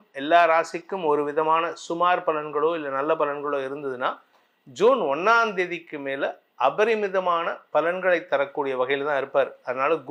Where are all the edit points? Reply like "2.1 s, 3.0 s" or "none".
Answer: none